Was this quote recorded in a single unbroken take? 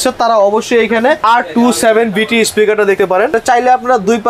no; 2 cuts; at 1.2 s, 3.1 s

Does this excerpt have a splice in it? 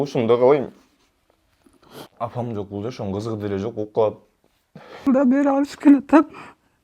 yes; 2 cuts; at 2.1 s, 5.0 s

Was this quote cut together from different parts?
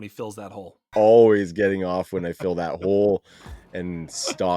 yes; 1 cut; at 0.9 s

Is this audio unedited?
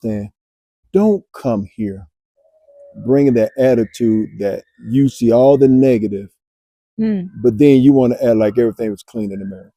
yes; 0 cuts

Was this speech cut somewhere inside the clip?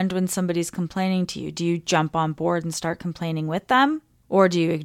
no; 0 cuts

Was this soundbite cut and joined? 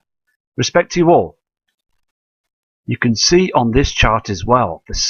yes; 1 cut; at 2.2 s

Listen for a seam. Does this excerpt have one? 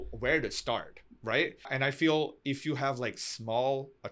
yes; 1 cut; at 1.7 s

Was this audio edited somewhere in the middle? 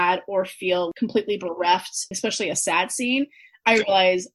yes; 2 cuts; at 0.9 s, 2.1 s

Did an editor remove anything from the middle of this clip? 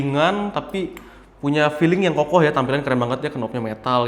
no; 0 cuts

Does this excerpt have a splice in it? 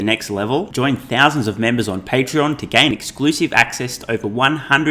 no; 0 cuts

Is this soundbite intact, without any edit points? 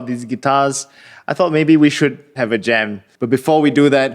no; 1 cut; at 3.1 s

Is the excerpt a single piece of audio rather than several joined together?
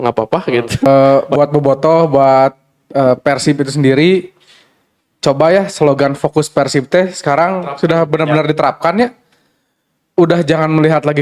no; 1 cut; at 1.1 s

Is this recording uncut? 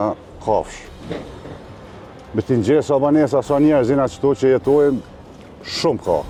yes; 0 cuts

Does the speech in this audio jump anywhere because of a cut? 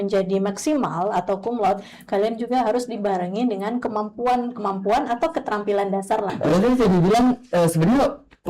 yes; 1 cut; at 6.3 s

